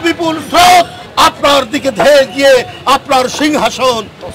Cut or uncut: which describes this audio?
cut